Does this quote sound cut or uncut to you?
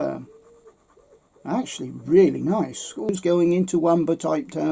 cut